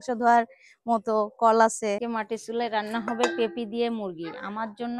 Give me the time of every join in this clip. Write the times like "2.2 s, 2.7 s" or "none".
2.0 s